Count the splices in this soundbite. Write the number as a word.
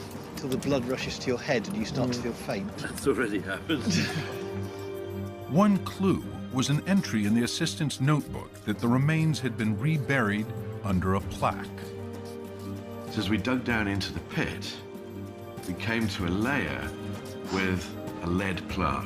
one